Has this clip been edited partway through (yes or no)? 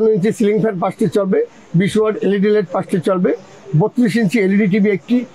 no